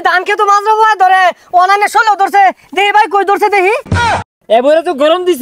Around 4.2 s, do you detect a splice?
yes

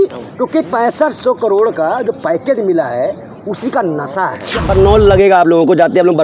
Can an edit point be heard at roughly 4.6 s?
yes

